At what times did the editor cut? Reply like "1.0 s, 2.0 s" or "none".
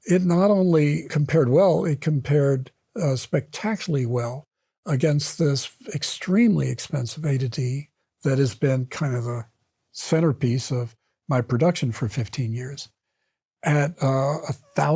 1.1 s